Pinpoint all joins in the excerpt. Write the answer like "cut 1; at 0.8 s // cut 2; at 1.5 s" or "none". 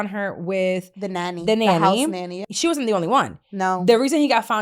cut 1; at 2.5 s